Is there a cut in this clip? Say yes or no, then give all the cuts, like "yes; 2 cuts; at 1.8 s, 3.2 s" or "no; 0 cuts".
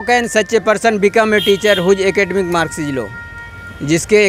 no; 0 cuts